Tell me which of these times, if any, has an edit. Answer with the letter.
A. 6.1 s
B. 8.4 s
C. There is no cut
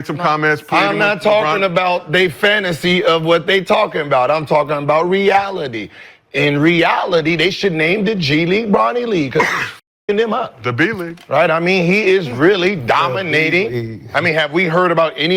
C